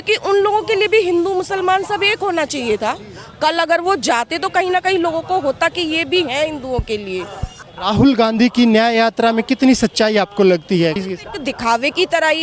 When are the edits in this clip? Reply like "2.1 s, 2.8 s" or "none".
7.7 s, 11.0 s